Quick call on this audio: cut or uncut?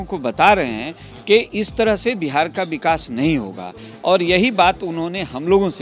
uncut